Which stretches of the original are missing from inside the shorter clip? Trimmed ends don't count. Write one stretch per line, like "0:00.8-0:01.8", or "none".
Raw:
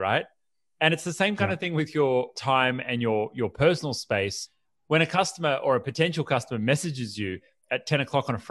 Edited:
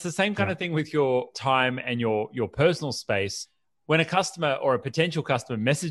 none